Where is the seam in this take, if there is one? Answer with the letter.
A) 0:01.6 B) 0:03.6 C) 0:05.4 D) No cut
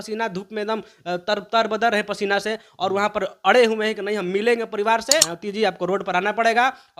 C